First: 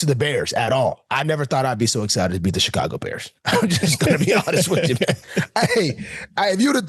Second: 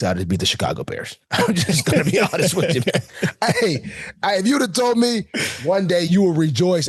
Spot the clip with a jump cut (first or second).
first